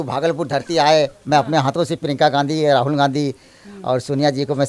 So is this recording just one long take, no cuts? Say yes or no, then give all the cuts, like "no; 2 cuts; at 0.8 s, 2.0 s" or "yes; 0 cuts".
yes; 0 cuts